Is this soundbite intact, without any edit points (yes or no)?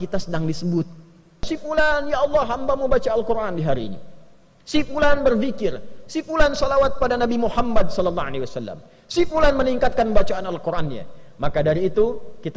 no